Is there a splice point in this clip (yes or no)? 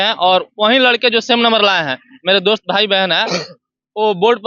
no